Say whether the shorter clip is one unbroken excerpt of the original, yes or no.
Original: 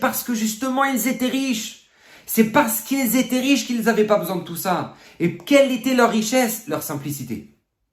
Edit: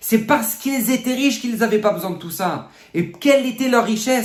yes